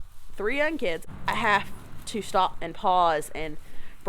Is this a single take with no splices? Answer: no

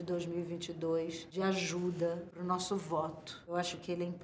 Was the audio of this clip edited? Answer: yes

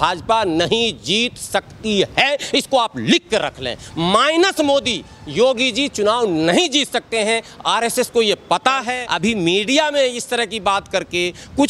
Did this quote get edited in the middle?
yes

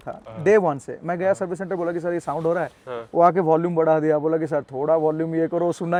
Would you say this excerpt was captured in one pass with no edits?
yes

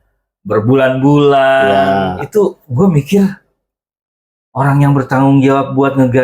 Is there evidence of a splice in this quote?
no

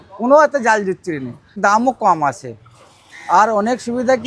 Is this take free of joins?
no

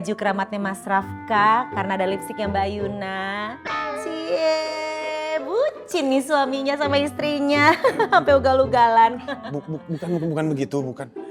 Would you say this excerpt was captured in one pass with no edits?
yes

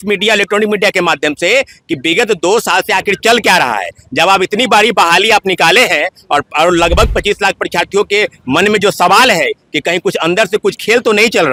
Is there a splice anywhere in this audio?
no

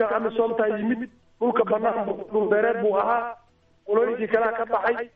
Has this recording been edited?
no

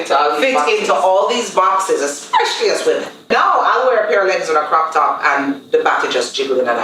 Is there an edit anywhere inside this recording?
yes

